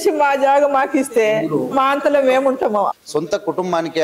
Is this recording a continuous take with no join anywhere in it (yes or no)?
no